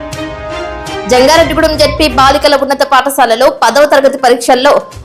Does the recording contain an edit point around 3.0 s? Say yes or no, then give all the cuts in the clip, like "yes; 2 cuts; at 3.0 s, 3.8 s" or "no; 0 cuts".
no; 1 cut; at 1.0 s